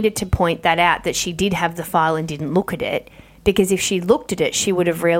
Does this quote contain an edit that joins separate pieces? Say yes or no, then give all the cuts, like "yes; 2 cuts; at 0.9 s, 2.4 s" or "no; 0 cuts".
no; 0 cuts